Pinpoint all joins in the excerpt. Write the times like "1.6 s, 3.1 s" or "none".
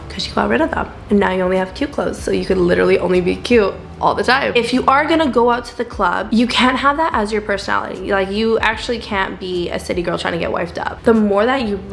4.5 s, 6.2 s, 10.8 s